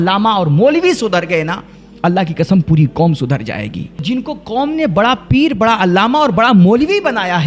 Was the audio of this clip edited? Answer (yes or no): yes